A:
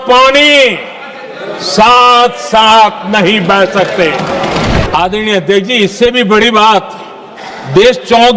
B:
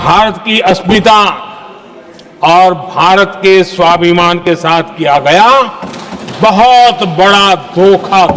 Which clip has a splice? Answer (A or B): A